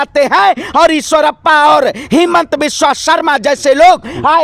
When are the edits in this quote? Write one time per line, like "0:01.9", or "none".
none